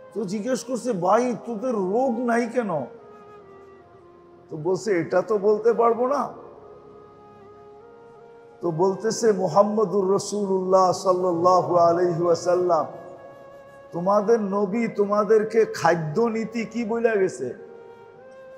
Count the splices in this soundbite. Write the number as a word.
four